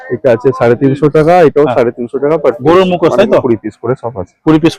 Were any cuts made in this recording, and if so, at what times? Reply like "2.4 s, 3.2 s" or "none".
none